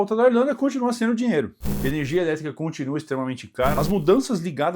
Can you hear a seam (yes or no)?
yes